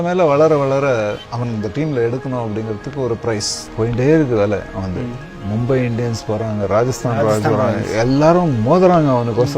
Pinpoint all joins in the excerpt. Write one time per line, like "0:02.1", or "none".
0:01.3
0:03.6